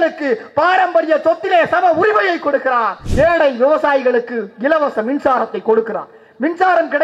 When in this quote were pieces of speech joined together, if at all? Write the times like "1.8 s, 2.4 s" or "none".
3.0 s